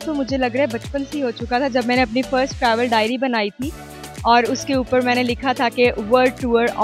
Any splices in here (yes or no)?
no